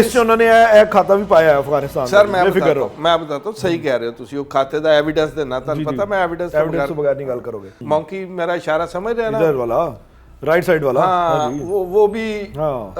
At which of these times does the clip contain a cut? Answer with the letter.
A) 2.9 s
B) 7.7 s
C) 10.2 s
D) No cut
B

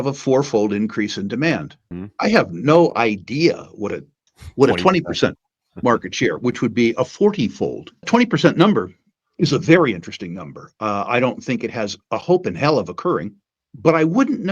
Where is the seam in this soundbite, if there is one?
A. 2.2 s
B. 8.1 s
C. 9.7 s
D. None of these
B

